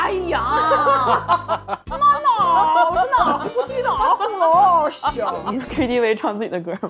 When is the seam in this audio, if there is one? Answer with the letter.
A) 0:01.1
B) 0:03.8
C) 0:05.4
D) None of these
C